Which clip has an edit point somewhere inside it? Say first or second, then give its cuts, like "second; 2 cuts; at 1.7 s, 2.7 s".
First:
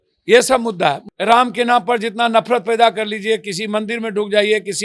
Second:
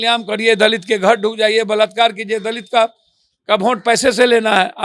first; 1 cut; at 1.1 s